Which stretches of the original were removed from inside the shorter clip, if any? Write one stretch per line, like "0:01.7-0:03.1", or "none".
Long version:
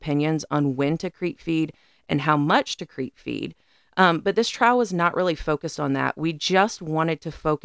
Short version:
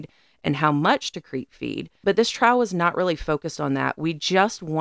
0:03.7-0:04.2

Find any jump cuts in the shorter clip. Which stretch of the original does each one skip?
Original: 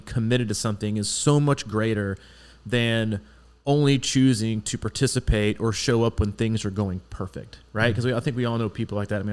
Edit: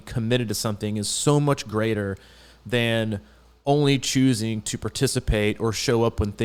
none

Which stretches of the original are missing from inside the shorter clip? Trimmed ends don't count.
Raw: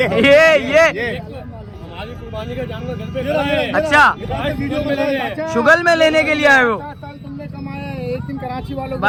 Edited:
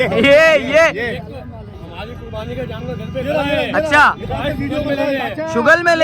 none

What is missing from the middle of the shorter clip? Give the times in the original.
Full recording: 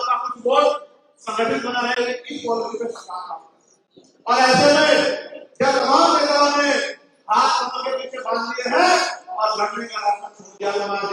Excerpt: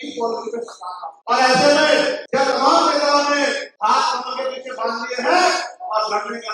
0:03.3-0:04.1
0:05.2-0:05.5
0:07.0-0:07.2

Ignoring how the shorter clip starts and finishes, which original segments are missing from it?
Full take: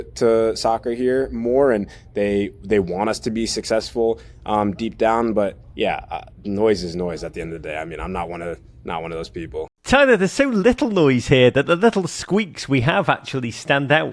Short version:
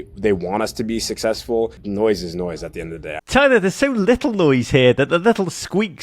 0:04.3-0:06.4
0:07.8-0:09.8

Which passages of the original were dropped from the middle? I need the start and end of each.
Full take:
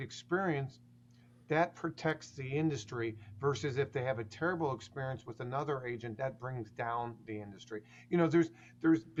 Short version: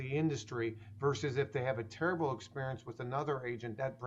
none

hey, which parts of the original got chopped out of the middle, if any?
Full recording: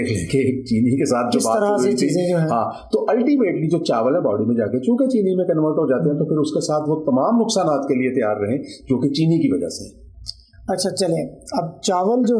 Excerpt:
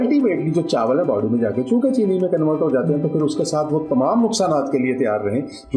none

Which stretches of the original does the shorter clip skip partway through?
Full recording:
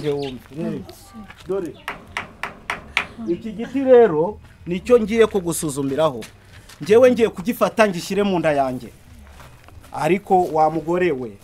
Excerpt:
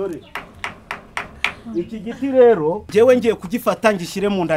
0:04.4-0:06.8

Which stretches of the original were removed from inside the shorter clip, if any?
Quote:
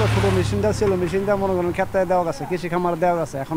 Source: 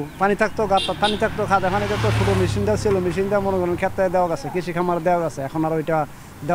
none

